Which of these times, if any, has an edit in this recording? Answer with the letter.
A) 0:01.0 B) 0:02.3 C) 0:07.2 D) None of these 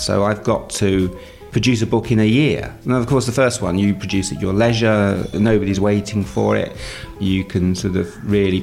C